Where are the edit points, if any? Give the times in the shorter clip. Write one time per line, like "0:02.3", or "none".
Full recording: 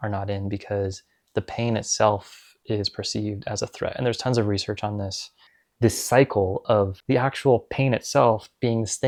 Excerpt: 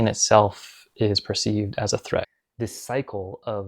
0:02.2